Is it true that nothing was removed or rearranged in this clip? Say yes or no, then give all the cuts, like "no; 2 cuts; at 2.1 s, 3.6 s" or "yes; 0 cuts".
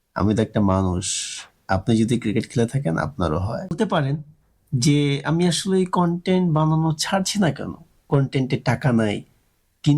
no; 1 cut; at 3.7 s